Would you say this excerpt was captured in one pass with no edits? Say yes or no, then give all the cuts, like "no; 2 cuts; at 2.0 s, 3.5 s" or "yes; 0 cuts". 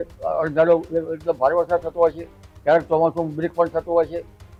yes; 0 cuts